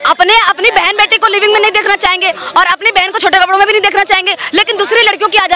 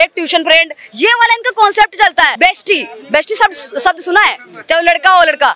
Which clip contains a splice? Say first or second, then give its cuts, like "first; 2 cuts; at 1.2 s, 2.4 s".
second; 1 cut; at 2.3 s